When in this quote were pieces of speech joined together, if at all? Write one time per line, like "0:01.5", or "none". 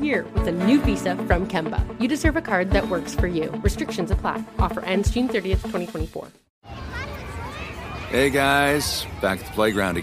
0:06.4